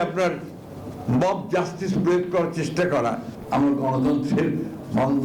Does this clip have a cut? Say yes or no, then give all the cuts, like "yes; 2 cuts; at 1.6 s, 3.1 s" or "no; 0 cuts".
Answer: yes; 1 cut; at 3.3 s